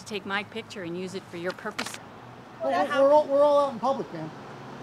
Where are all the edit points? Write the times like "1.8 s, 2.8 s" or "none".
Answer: 2.0 s